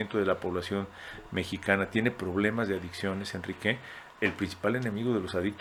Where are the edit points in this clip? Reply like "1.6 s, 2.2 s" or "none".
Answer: none